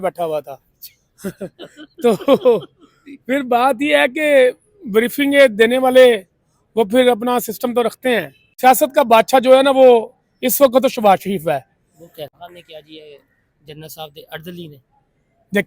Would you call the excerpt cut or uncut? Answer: cut